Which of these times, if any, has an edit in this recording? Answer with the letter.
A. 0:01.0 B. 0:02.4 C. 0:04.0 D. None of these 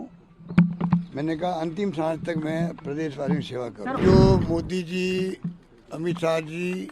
C